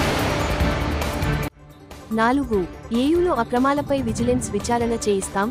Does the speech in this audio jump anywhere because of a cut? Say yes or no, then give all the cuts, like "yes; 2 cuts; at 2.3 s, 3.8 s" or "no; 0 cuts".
no; 0 cuts